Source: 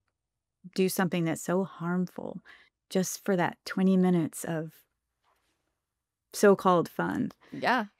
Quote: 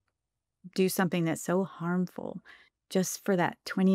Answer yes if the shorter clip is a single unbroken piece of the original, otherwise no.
yes